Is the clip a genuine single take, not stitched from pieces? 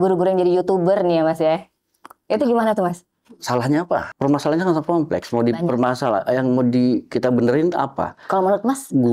no; 1 cut; at 4.1 s

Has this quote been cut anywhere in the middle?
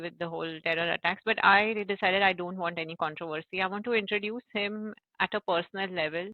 no; 0 cuts

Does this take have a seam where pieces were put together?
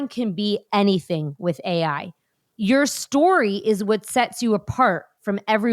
yes; 1 cut; at 2.4 s

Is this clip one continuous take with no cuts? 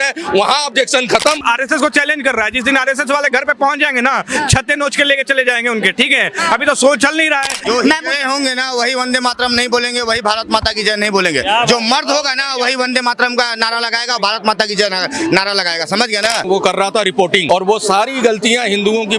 no; 4 cuts; at 1.4 s, 7.6 s, 16.5 s, 17.5 s

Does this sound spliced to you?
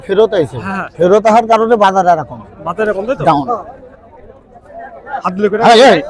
no; 0 cuts

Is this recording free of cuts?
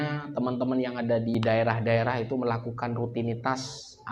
no; 1 cut; at 1.3 s

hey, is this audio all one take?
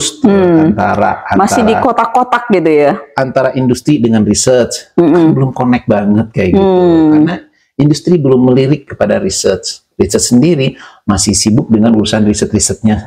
yes; 0 cuts

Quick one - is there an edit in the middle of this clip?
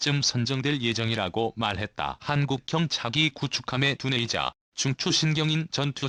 no; 0 cuts

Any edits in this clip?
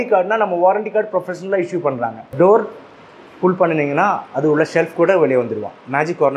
yes; 1 cut; at 2.3 s

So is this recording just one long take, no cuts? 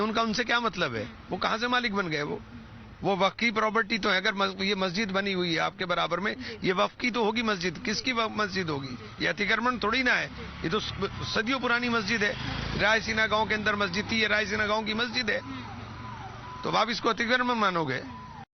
no; 1 cut; at 17.5 s

